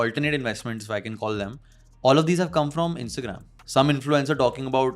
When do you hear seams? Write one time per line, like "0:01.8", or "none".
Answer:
0:03.6

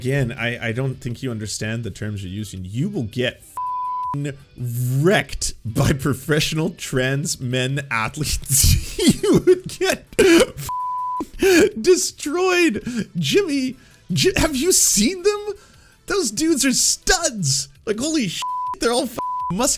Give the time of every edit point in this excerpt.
none

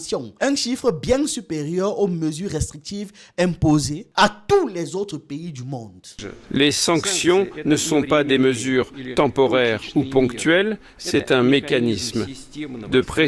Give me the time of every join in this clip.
0:06.2

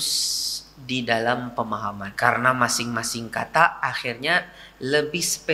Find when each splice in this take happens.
0:02.1

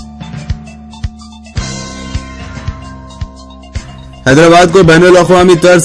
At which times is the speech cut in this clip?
0:03.8

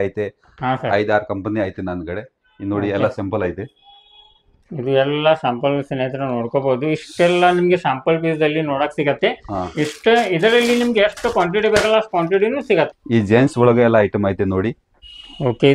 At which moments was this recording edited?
0:12.9

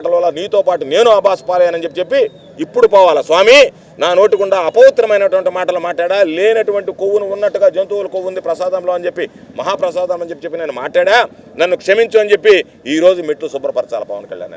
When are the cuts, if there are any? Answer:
none

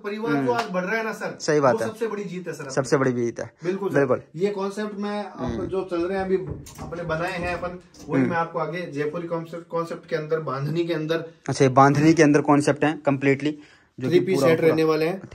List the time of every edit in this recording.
none

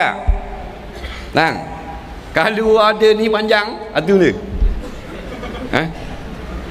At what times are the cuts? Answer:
none

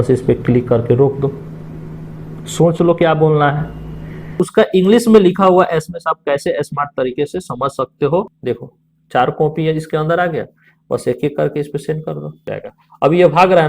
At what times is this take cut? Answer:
0:04.4
0:08.3
0:12.4

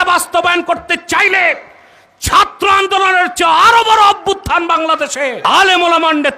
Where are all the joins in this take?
0:05.4

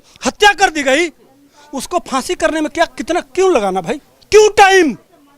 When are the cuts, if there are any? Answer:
0:04.1

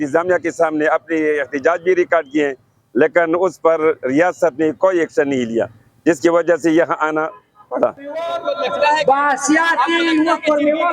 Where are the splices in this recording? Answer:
0:08.4

